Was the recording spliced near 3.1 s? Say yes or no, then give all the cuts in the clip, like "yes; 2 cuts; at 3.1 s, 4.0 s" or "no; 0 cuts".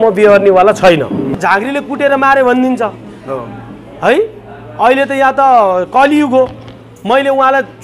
no; 1 cut; at 1.3 s